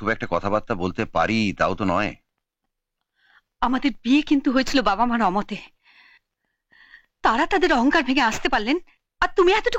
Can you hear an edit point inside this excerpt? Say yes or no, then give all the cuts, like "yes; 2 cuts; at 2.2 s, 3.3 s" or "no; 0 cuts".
no; 0 cuts